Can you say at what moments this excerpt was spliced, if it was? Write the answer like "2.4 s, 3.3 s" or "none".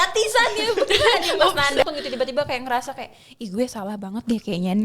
1.8 s

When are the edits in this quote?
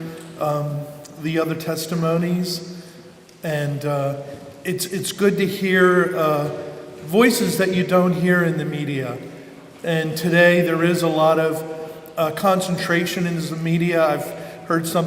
8.3 s

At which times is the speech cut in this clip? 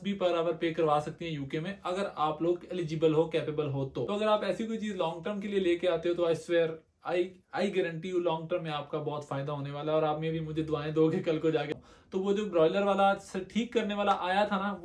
4.1 s, 11.7 s

